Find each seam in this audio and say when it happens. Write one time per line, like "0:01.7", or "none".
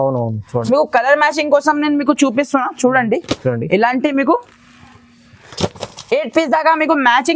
none